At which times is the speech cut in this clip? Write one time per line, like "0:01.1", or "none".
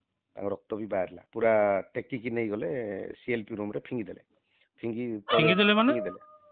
0:01.2